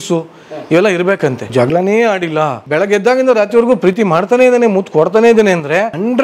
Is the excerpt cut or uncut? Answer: cut